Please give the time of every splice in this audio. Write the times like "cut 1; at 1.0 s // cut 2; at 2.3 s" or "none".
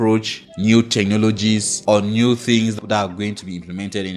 none